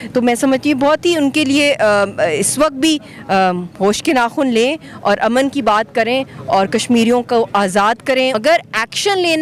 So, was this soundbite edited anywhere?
yes; 1 cut; at 8.4 s

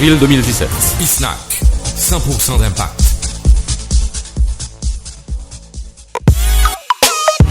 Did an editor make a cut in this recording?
yes; 1 cut; at 6.2 s

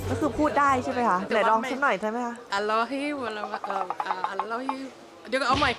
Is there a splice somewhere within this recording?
yes; 2 cuts; at 1.3 s, 2.4 s

